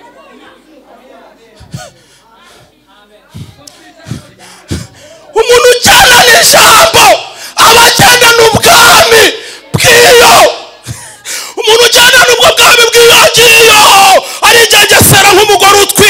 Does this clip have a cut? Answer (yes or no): no